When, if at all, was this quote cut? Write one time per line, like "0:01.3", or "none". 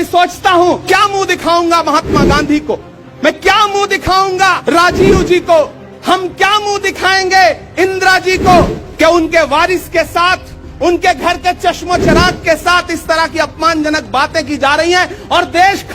0:00.8
0:04.6
0:08.8